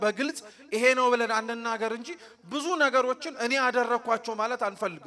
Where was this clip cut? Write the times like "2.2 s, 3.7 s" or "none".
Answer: none

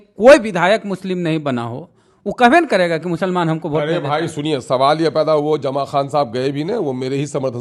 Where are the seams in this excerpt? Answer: none

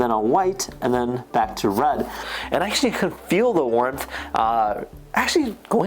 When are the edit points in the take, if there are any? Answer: 2.3 s

